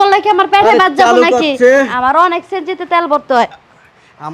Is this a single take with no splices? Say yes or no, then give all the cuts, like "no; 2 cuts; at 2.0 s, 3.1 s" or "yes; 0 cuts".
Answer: yes; 0 cuts